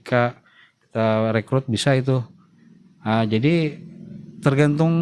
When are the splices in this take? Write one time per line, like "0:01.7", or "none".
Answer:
none

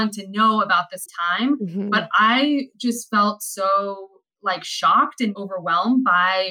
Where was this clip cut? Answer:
0:05.4

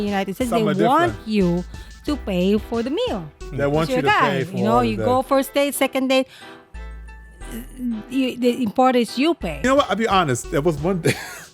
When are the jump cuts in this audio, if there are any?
0:09.6

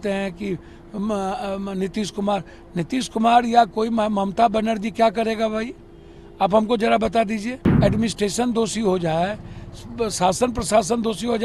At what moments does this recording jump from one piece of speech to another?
0:07.6

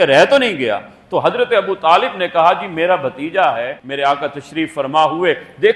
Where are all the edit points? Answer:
0:03.8

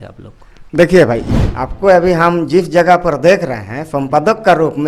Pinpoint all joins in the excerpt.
0:01.2

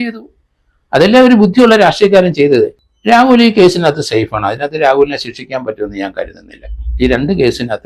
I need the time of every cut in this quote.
0:02.9

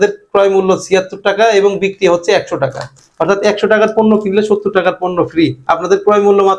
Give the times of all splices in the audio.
0:03.0

